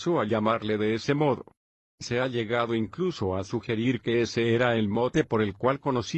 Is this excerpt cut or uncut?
cut